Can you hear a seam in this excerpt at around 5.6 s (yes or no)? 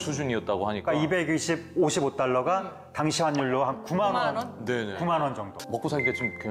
yes